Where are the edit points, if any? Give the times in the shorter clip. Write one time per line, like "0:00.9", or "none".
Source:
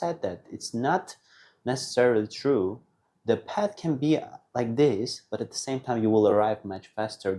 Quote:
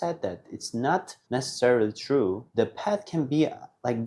0:01.2
0:02.4